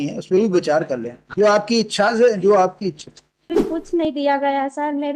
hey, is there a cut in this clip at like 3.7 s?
yes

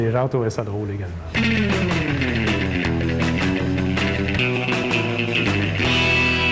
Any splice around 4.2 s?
no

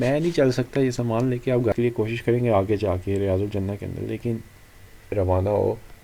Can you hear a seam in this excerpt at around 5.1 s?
yes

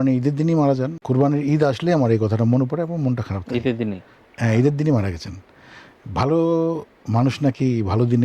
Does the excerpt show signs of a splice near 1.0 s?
yes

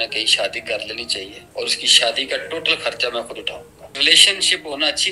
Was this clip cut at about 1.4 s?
yes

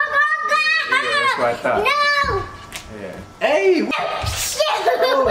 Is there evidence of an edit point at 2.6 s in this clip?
no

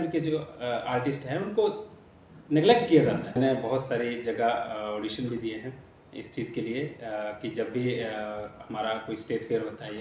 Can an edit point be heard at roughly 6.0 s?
no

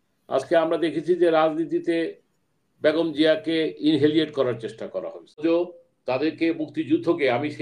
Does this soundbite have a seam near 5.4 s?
yes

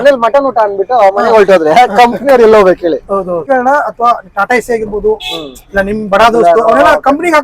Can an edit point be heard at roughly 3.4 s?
yes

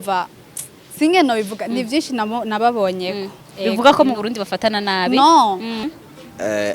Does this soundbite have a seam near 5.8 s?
yes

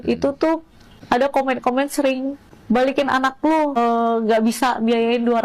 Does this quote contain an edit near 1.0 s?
yes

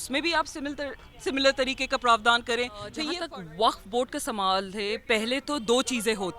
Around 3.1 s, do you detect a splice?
yes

